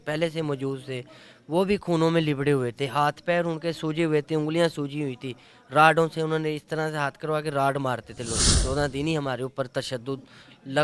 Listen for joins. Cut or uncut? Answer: cut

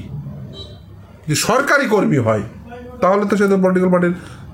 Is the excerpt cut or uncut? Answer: uncut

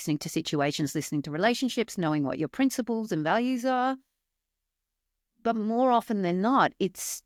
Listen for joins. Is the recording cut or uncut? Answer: uncut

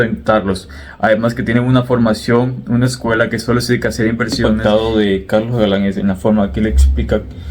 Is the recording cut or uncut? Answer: cut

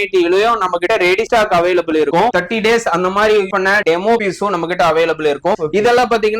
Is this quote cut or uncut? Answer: cut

